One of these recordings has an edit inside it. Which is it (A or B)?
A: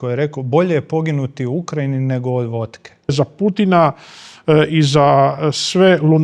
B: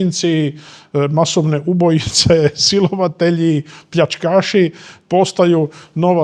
A